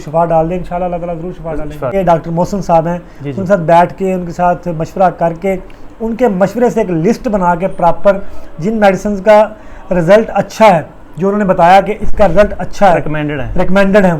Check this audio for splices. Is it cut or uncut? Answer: cut